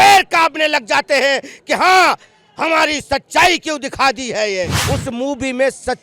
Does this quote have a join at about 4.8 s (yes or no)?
yes